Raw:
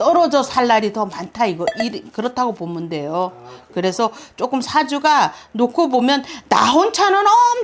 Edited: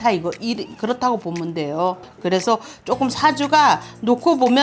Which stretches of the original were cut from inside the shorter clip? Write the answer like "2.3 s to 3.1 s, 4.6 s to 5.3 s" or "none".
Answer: 3.4 s to 3.6 s